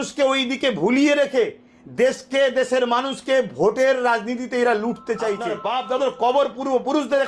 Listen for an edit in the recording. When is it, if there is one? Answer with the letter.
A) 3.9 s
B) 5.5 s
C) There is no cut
B